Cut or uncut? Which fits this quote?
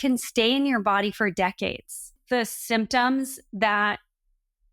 cut